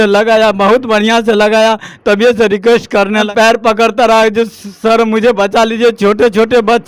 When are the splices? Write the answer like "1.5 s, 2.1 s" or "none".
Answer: 3.3 s